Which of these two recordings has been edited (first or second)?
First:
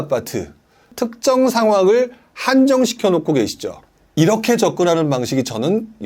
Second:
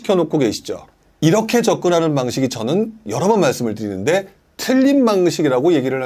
first